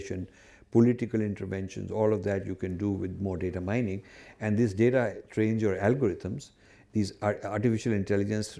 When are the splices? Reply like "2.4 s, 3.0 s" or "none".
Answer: none